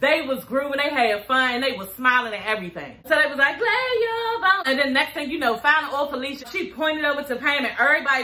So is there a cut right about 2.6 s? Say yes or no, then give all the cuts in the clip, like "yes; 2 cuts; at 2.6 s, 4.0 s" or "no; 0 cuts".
no; 2 cuts; at 4.6 s, 6.5 s